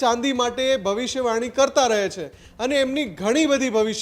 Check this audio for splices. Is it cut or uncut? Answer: uncut